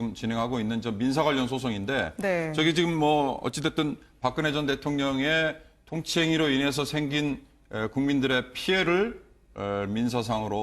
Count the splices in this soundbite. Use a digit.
1